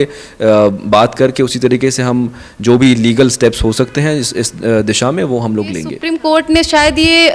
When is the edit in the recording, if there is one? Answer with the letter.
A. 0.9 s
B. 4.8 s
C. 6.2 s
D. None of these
C